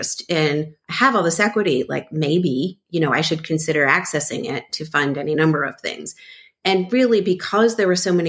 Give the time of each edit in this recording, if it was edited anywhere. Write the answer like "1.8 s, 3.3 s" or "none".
none